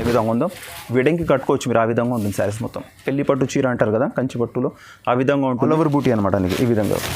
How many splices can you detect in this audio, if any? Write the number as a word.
one